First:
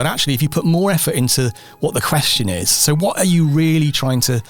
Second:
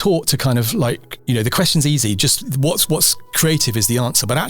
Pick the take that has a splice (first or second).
second